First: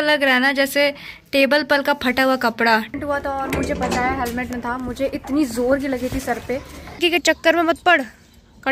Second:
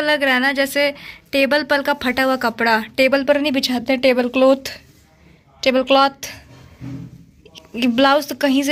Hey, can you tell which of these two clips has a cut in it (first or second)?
first